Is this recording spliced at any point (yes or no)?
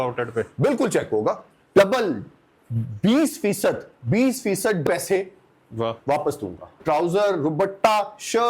yes